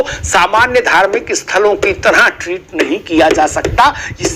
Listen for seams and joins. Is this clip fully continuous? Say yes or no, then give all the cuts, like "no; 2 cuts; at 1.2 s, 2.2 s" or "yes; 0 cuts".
yes; 0 cuts